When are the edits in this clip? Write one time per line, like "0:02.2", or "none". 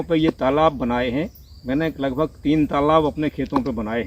none